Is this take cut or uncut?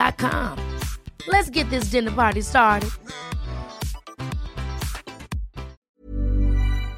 cut